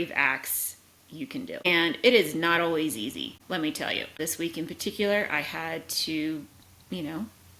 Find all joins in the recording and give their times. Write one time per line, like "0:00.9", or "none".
0:01.7
0:03.3
0:04.2